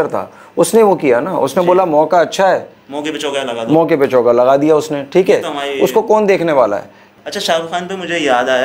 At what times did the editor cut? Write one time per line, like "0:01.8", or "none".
0:07.1